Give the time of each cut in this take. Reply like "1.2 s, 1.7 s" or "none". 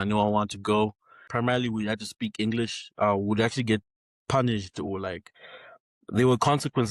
1.2 s